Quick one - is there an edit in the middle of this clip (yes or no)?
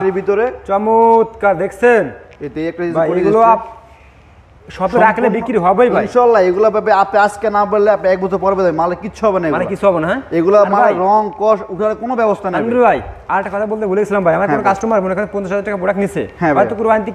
no